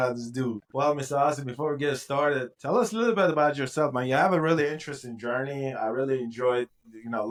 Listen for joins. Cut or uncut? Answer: uncut